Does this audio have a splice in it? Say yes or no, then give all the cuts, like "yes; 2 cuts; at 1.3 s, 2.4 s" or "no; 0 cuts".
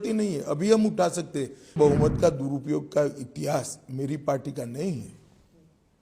yes; 1 cut; at 1.8 s